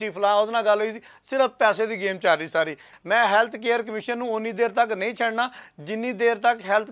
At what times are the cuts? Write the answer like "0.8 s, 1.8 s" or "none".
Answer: 2.9 s

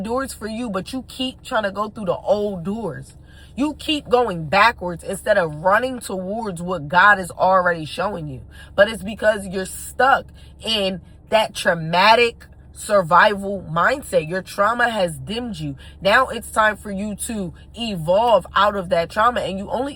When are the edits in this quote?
none

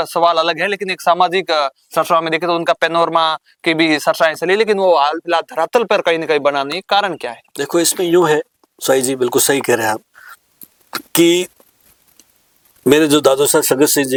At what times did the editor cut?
none

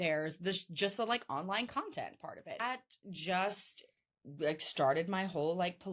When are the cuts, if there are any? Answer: 2.6 s

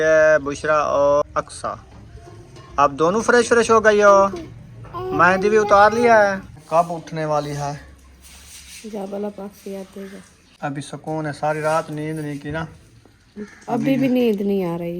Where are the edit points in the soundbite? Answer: 1.2 s, 6.6 s, 10.4 s

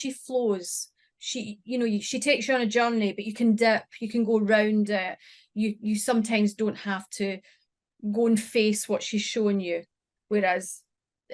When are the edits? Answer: none

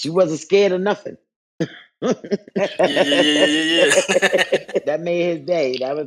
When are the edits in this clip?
2.5 s, 4.8 s

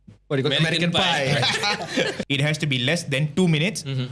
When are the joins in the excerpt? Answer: 2.2 s

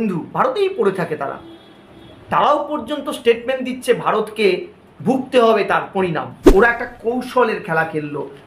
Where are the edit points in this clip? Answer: 6.4 s

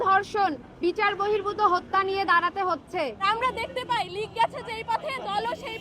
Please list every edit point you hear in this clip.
3.3 s

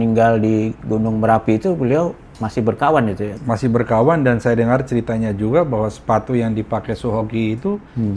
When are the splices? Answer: none

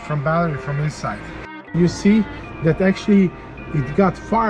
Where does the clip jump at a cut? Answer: 1.5 s

